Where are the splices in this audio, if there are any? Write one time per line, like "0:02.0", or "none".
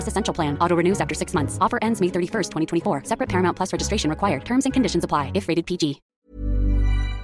0:06.1